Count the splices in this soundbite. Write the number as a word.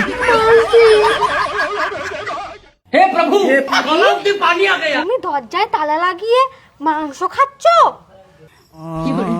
one